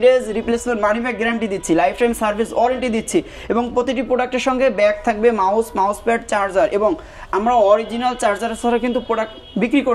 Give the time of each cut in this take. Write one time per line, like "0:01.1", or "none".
none